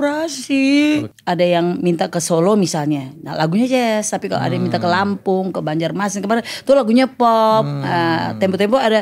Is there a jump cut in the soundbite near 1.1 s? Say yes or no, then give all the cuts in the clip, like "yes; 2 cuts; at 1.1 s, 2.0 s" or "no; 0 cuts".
yes; 1 cut; at 1.1 s